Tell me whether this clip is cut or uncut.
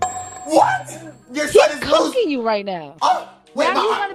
cut